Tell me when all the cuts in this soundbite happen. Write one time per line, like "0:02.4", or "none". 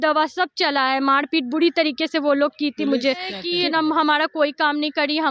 0:03.4